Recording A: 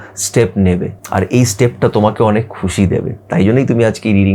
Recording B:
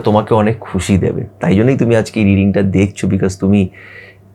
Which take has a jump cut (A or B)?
A